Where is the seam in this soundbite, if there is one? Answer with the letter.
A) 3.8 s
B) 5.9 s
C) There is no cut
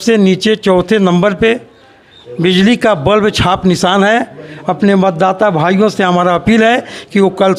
C